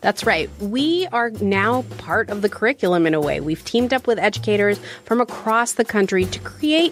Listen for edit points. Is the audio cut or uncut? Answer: uncut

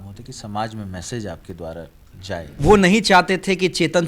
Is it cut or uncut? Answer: cut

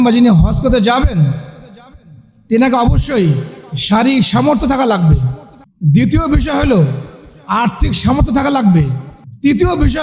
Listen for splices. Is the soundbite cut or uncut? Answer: uncut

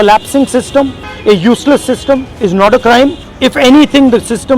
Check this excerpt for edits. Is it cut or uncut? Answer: cut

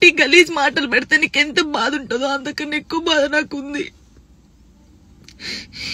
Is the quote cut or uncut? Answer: uncut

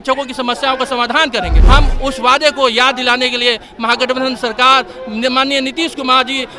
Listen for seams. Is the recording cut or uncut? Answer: cut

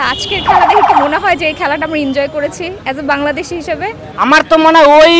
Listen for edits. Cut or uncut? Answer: cut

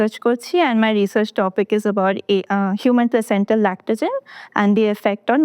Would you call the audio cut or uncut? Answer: uncut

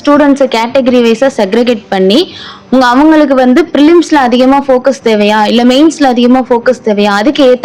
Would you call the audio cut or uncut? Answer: uncut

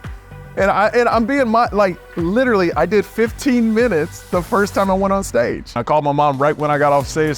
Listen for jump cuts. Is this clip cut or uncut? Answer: cut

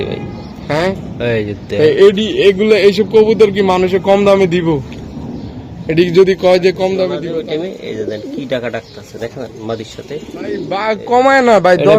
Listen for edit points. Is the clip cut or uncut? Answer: cut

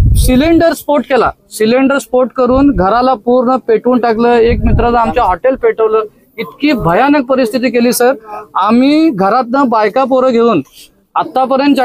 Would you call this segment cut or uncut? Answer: uncut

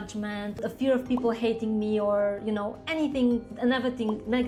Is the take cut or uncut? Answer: uncut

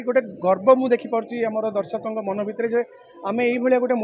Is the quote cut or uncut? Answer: uncut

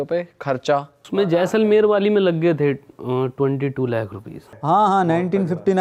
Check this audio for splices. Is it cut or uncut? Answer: cut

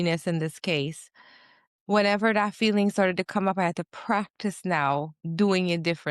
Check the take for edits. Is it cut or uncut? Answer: cut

